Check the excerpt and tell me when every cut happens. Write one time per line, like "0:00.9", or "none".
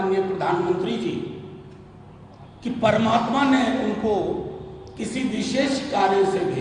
none